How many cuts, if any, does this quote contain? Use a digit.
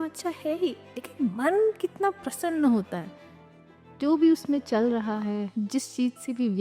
1